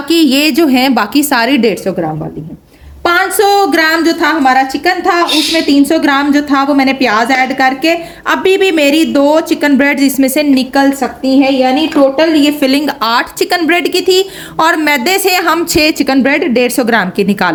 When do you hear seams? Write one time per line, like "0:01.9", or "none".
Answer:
none